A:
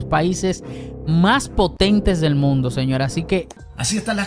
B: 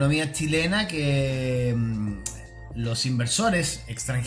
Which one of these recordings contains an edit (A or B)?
A